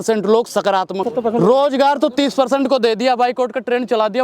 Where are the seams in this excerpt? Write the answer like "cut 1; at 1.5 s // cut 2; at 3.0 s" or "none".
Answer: cut 1; at 1.1 s

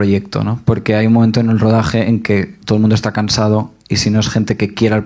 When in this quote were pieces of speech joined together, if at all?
none

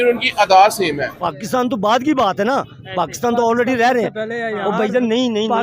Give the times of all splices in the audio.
cut 1; at 1.1 s

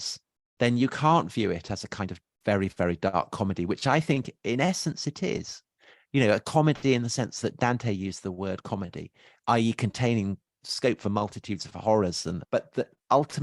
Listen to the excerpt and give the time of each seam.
cut 1; at 10.7 s // cut 2; at 12.4 s

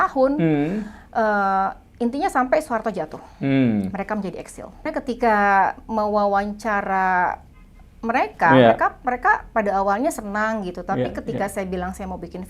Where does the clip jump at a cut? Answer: cut 1; at 4.9 s

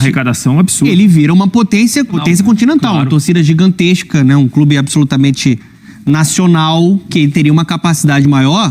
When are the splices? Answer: cut 1; at 2.2 s

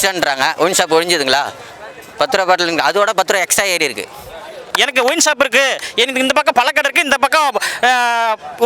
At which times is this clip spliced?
cut 1; at 4.6 s

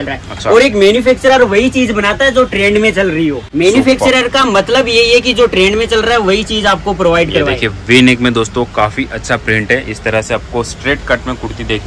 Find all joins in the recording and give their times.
cut 1; at 3.4 s

